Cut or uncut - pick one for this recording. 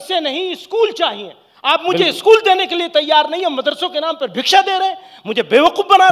uncut